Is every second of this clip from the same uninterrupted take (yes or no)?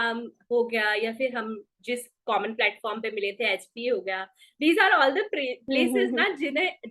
yes